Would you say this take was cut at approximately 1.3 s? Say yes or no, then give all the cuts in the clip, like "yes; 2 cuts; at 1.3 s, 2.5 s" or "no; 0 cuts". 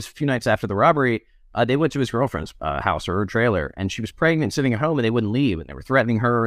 no; 0 cuts